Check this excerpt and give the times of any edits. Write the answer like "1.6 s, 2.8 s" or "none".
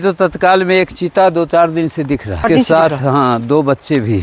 2.4 s